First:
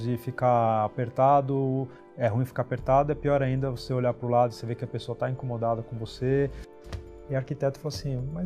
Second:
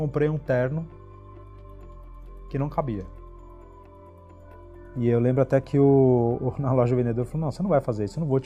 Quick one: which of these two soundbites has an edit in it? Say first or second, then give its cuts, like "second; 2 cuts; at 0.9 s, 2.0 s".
first; 1 cut; at 6.7 s